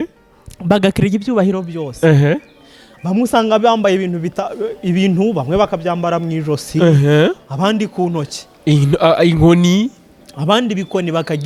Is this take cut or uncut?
uncut